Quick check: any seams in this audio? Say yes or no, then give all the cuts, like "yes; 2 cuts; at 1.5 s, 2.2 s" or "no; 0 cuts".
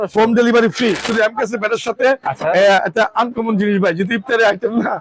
yes; 1 cut; at 1.1 s